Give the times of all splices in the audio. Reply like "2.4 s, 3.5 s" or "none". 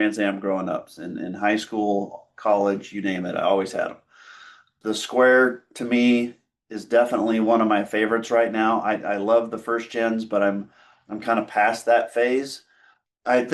4.8 s